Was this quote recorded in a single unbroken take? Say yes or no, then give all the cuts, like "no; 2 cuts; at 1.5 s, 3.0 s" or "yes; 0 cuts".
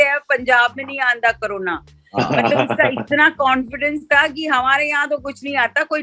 yes; 0 cuts